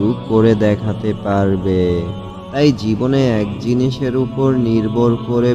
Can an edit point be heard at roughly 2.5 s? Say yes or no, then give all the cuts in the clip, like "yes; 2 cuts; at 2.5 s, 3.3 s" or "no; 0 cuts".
yes; 1 cut; at 2.5 s